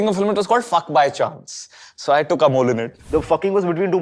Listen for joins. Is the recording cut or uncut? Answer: cut